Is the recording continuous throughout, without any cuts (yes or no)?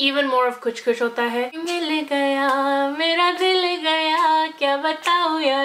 no